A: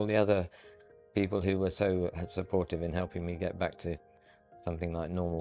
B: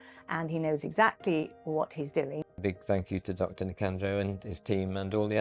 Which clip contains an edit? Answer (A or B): B